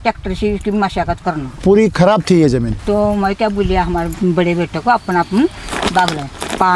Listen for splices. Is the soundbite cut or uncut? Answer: cut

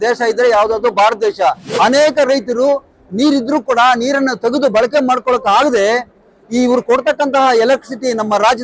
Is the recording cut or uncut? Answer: cut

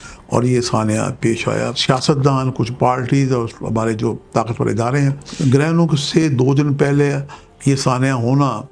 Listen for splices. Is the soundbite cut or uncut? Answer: cut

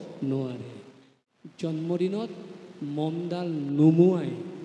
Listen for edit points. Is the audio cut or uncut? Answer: cut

